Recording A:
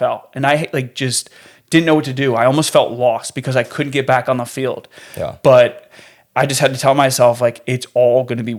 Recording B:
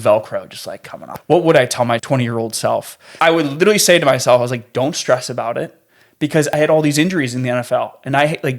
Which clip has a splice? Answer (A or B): B